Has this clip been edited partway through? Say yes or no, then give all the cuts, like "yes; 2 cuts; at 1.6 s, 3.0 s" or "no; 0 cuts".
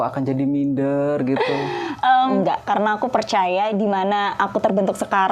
yes; 1 cut; at 2.3 s